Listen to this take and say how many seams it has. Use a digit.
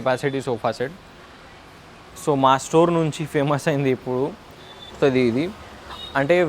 1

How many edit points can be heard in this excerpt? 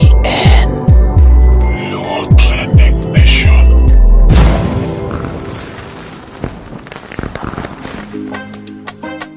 1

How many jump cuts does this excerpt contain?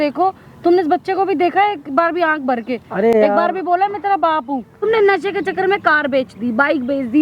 1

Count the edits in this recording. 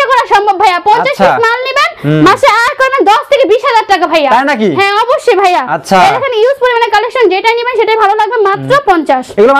0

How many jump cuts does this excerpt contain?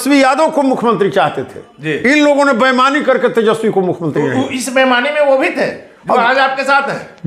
0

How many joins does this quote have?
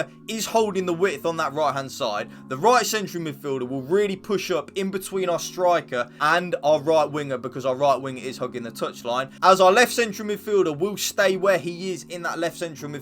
2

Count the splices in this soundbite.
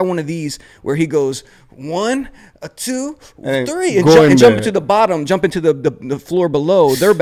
0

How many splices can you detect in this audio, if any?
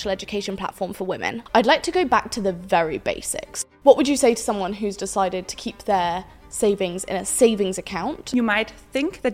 3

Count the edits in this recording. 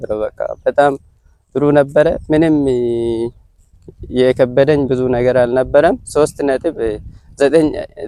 0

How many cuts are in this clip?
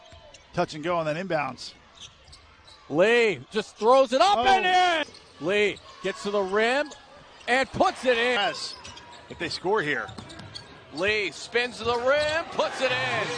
2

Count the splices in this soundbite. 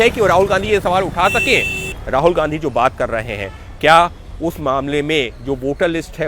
1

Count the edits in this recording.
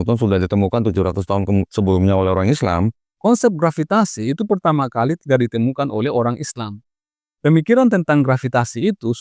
1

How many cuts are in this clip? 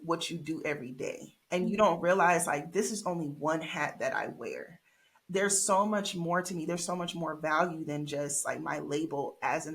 1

